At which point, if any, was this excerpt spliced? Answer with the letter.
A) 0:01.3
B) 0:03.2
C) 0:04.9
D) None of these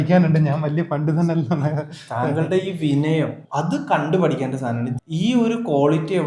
C